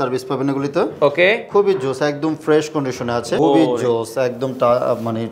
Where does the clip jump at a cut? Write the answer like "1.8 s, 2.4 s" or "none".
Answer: 3.4 s